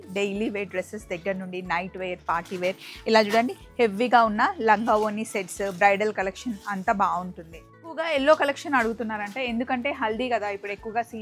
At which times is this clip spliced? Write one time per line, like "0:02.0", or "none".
0:08.0